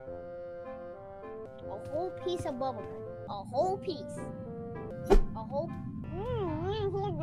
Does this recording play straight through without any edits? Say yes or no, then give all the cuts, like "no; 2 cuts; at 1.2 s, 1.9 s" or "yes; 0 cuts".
no; 4 cuts; at 1.5 s, 3.2 s, 4.9 s, 6.0 s